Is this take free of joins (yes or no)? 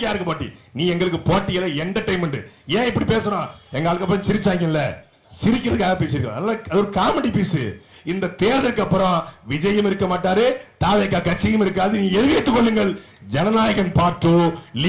yes